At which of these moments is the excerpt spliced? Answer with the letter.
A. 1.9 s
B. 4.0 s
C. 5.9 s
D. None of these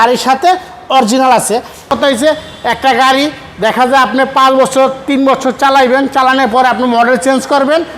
A